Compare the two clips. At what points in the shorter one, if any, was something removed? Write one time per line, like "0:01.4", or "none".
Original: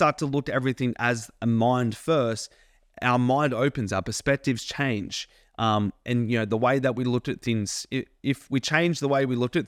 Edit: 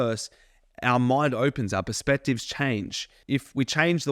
0:03.2